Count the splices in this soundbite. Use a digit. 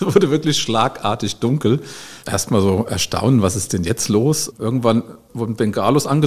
3